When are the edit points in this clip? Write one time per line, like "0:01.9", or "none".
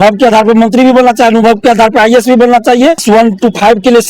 0:03.0